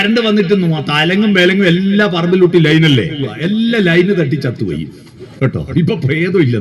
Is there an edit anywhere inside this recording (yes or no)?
yes